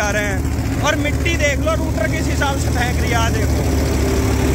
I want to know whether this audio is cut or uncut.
uncut